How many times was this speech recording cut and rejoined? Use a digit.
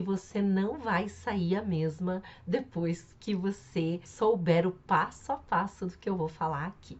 1